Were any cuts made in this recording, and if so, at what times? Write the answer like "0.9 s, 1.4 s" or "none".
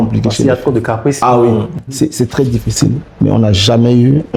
none